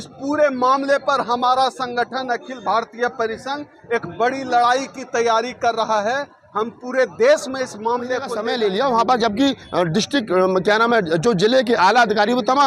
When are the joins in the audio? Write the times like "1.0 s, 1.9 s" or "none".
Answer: 8.3 s